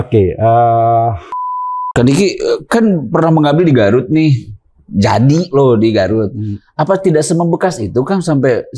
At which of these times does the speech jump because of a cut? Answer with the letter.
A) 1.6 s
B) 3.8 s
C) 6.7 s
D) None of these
A